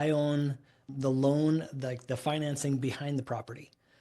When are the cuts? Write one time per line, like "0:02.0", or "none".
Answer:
0:00.9